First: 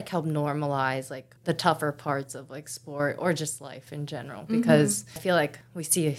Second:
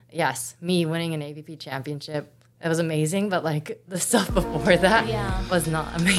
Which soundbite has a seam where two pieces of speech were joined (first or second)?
first